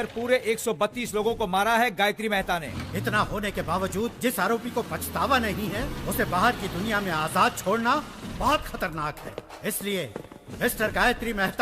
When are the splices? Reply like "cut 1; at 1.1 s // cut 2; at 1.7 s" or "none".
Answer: cut 1; at 2.7 s